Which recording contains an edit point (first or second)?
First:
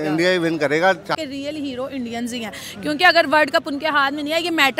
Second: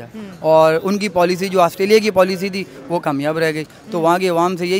first